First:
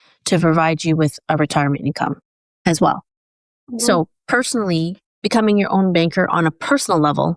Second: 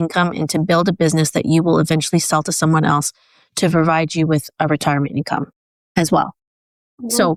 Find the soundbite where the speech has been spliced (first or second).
first